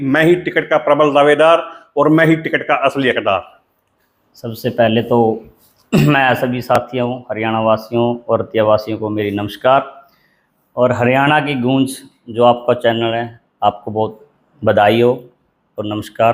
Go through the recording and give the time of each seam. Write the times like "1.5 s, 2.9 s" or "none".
none